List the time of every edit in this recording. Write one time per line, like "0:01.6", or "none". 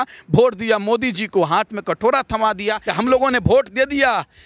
0:02.8